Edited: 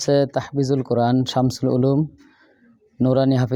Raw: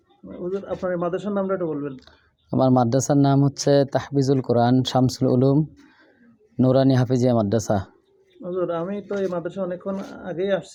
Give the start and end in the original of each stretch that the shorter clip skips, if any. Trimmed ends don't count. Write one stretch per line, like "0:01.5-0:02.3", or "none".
none